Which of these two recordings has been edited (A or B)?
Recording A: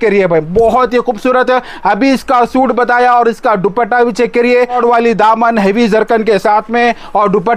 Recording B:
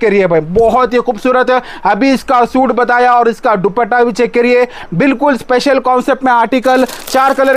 A